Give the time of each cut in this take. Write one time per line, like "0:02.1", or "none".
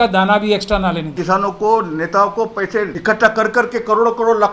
0:01.1
0:02.9